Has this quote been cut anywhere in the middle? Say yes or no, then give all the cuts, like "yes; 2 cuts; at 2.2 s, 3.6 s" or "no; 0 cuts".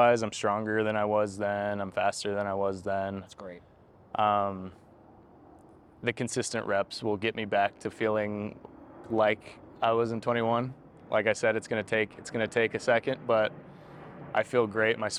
no; 0 cuts